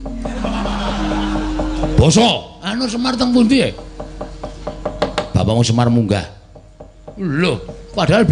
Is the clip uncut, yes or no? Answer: yes